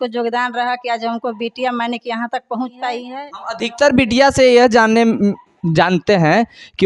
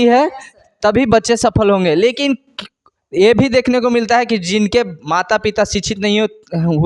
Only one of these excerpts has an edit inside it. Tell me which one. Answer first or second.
first